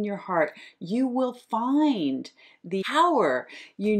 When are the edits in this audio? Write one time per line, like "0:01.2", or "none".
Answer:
0:02.8